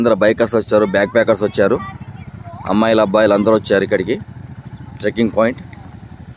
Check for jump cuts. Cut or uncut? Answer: uncut